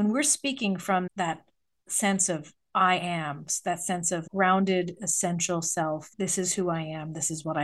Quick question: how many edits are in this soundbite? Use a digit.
2